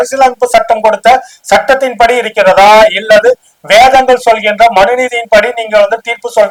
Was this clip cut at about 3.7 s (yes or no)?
no